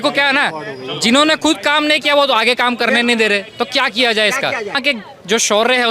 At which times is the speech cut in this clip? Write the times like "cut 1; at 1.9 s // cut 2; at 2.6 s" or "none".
cut 1; at 4.8 s